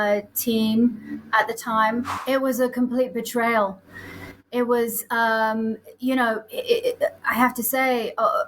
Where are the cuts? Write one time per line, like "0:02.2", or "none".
0:02.1